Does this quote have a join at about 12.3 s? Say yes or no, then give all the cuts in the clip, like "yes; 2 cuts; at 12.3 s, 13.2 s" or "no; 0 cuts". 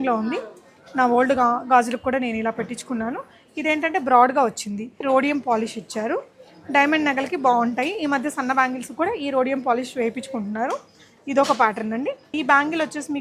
yes; 2 cuts; at 5.0 s, 12.3 s